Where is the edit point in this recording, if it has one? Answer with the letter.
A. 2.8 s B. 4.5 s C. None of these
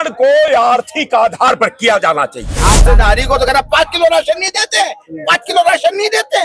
A